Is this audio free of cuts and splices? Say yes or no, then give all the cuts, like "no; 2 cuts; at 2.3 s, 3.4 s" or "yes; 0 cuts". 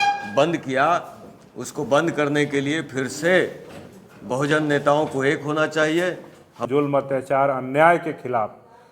no; 1 cut; at 6.6 s